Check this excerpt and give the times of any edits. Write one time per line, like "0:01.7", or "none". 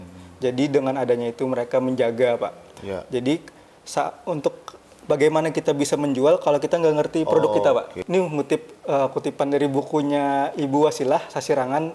0:08.0